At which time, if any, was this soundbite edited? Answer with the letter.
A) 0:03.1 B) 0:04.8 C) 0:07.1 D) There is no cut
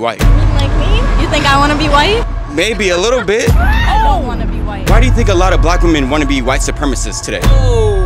B